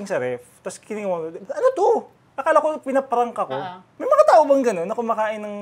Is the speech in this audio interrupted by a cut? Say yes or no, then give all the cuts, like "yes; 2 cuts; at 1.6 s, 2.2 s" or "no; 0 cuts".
yes; 1 cut; at 3.9 s